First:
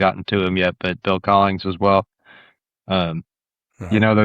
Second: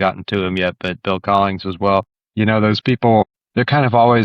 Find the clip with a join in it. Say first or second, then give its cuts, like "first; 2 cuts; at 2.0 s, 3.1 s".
second; 2 cuts; at 2.2 s, 3.2 s